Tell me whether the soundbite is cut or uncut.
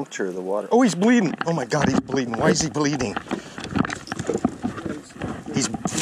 uncut